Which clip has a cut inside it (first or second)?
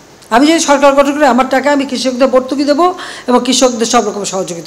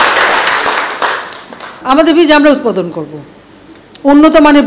second